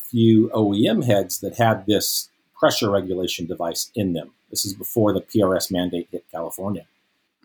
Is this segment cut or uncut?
uncut